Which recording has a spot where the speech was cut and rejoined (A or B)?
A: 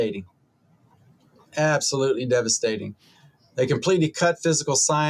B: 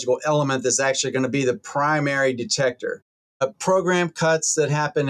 B